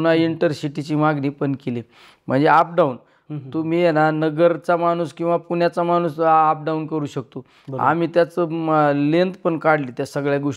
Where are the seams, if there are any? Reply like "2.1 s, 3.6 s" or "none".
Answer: none